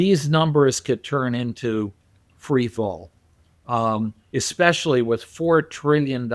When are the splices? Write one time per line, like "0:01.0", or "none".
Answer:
none